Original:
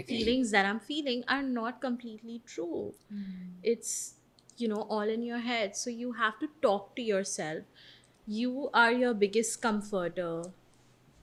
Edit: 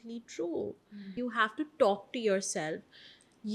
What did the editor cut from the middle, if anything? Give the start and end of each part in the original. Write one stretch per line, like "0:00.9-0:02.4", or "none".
0:03.2-0:05.9